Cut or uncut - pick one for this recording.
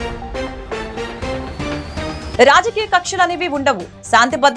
cut